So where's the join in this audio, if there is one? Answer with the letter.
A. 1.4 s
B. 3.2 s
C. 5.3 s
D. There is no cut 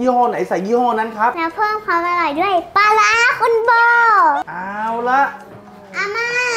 D